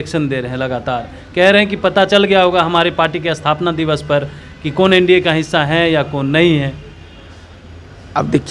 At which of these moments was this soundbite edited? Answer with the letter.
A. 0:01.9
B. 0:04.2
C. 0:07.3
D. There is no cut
D